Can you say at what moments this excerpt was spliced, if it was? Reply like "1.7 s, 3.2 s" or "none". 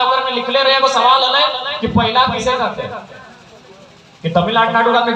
none